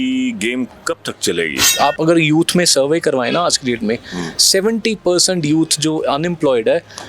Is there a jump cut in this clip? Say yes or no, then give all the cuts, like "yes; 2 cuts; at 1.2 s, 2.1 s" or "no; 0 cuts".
yes; 1 cut; at 1.7 s